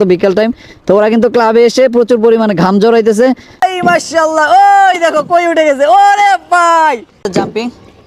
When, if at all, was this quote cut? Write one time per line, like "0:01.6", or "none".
0:03.6
0:07.3